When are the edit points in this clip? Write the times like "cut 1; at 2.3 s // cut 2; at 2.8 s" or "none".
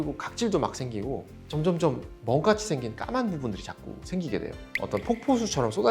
cut 1; at 4.6 s